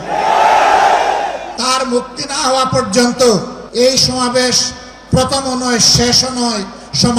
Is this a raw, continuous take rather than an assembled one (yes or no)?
no